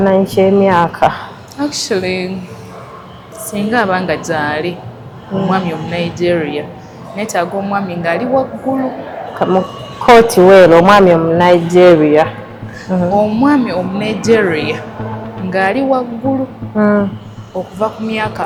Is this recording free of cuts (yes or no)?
yes